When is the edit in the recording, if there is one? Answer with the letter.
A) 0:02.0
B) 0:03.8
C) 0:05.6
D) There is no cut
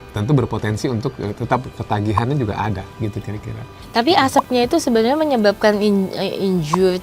B